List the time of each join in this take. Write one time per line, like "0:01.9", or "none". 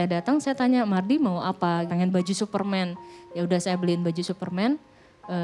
0:01.9